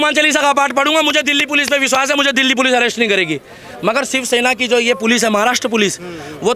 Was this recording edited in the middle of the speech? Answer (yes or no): no